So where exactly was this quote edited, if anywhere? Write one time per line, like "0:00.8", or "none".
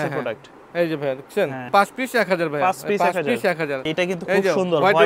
0:01.7
0:03.8